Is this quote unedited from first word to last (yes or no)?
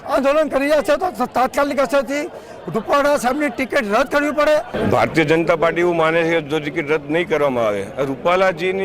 no